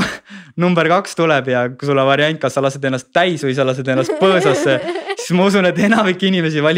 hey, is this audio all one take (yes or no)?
yes